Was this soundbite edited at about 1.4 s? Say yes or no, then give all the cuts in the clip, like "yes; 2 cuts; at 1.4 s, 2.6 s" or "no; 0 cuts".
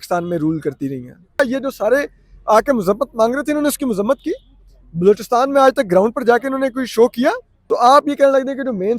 yes; 2 cuts; at 1.4 s, 7.5 s